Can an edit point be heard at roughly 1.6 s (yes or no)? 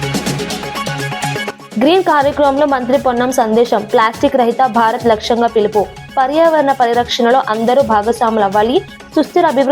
yes